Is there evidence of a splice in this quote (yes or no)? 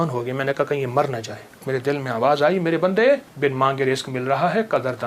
yes